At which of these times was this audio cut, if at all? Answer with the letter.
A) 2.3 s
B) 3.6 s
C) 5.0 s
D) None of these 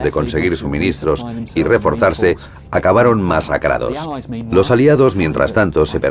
D